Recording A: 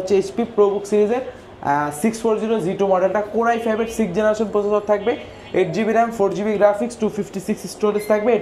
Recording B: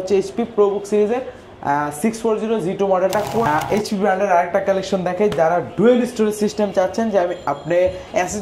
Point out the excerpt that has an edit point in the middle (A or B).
B